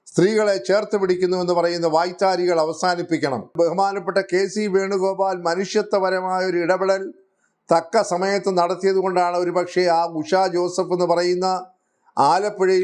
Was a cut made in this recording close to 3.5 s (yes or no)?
yes